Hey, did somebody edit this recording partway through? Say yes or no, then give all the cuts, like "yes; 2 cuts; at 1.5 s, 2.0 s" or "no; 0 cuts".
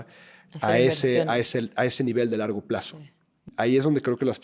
yes; 1 cut; at 3.5 s